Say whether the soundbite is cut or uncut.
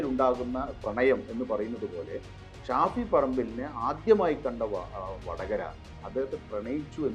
uncut